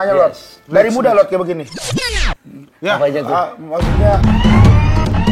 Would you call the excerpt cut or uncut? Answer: uncut